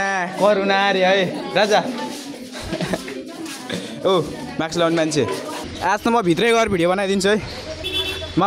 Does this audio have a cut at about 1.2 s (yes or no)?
no